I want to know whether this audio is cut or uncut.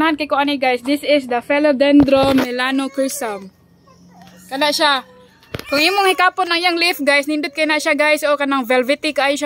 uncut